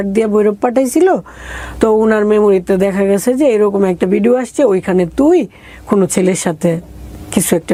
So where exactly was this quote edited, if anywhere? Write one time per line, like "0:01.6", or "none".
none